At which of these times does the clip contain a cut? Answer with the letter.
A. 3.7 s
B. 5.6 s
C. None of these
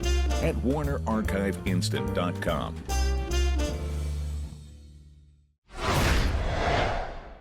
B